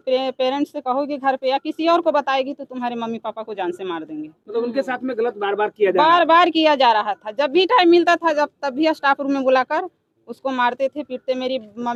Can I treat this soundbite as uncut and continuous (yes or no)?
yes